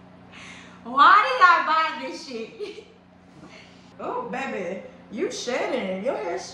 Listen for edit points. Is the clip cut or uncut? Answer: cut